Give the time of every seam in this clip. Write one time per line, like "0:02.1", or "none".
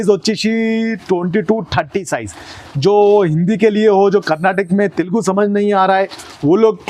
none